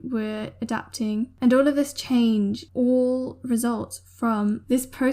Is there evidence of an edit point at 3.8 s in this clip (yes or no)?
no